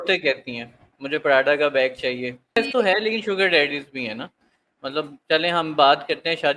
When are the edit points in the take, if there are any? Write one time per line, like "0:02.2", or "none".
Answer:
0:02.6